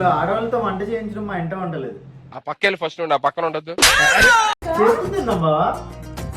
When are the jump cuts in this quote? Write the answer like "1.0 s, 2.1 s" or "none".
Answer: 4.6 s